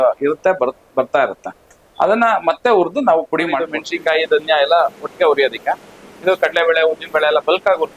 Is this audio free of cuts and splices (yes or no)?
no